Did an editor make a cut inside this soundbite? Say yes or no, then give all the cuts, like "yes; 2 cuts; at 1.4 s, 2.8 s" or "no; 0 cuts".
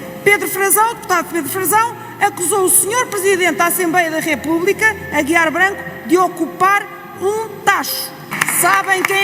yes; 1 cut; at 8.3 s